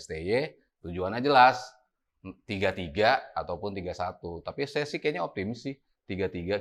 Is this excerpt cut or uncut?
uncut